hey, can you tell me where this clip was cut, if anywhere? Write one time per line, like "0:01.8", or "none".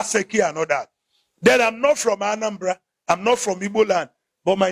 none

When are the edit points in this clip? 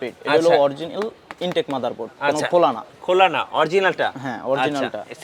none

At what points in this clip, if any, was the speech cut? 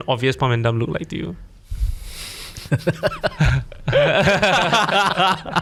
none

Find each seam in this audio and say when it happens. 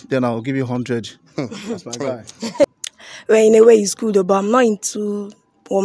0:02.6

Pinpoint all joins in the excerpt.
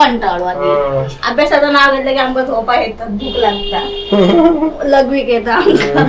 none

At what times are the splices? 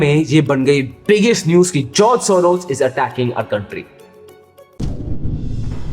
0:04.1

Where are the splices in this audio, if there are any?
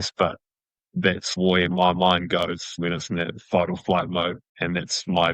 0:01.2
0:02.8
0:04.5

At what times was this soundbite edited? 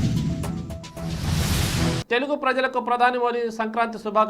none

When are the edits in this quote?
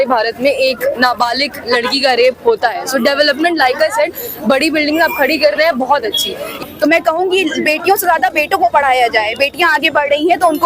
0:06.5

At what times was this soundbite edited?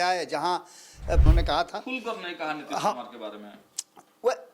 0:01.2

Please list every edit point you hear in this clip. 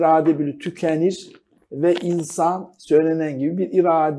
0:02.7

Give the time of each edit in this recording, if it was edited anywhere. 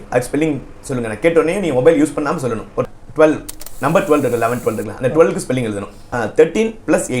0:02.8
0:06.3

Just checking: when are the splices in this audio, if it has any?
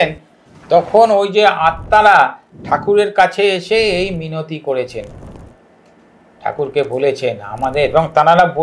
none

